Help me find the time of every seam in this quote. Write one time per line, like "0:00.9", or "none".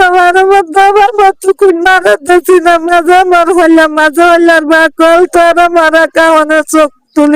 none